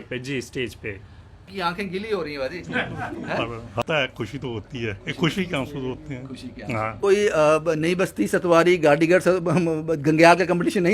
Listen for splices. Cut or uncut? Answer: cut